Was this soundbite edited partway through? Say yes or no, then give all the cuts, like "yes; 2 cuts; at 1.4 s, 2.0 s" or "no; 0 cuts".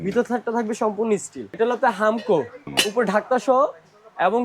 yes; 2 cuts; at 1.4 s, 2.6 s